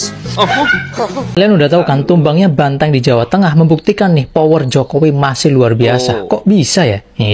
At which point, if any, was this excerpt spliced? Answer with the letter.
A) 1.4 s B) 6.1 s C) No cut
A